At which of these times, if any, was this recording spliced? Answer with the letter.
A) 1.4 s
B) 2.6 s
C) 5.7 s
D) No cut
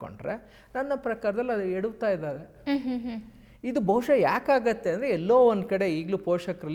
D